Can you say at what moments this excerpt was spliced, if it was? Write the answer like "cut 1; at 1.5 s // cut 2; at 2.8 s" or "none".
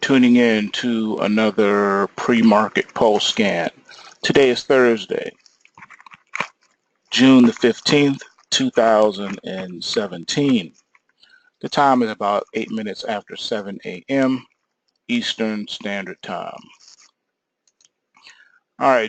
none